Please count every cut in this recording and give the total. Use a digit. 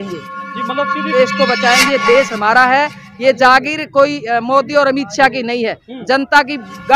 1